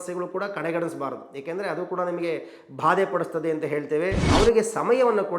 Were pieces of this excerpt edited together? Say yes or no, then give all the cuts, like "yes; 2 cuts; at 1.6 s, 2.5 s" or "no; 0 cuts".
yes; 1 cut; at 4.2 s